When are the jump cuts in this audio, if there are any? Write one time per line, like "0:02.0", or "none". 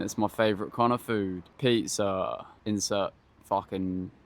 0:01.4
0:02.5
0:03.3